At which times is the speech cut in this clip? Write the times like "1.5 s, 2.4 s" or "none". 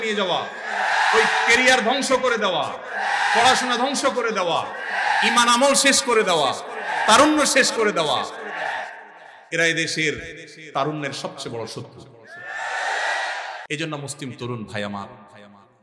13.6 s